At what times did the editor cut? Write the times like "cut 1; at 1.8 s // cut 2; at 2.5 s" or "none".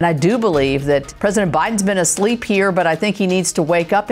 cut 1; at 1.1 s